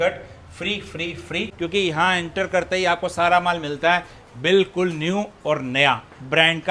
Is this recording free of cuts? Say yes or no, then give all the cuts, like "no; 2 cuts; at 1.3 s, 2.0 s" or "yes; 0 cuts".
no; 1 cut; at 1.5 s